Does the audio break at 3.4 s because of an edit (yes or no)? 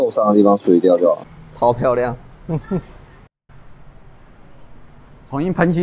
yes